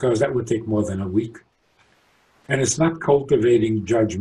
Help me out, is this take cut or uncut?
uncut